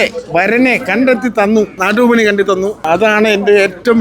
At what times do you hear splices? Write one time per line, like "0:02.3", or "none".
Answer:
0:01.8
0:02.8